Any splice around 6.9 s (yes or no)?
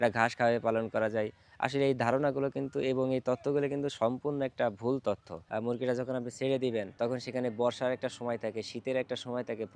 yes